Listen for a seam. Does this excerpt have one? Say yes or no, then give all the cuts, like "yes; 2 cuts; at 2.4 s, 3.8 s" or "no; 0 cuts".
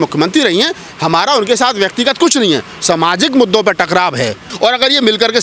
yes; 1 cut; at 4.5 s